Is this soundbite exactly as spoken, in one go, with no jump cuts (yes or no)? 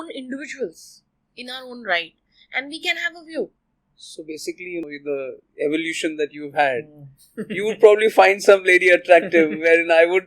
no